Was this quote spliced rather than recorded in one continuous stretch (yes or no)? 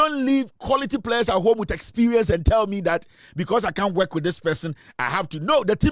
no